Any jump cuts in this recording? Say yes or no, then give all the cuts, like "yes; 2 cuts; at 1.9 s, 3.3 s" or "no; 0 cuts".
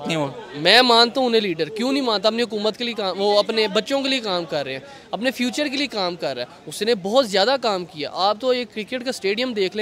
no; 0 cuts